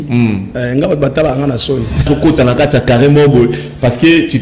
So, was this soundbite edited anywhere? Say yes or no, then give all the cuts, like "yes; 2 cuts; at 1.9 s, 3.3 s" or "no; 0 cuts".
yes; 1 cut; at 2.1 s